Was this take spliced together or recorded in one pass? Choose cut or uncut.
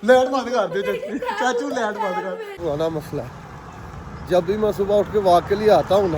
cut